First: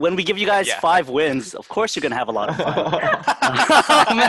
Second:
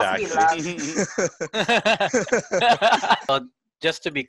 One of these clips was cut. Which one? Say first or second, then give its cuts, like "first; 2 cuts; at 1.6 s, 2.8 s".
second; 1 cut; at 3.3 s